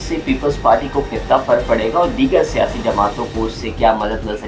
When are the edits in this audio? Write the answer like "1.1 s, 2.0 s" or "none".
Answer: none